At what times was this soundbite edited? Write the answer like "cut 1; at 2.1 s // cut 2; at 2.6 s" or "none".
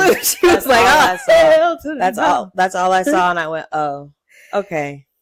none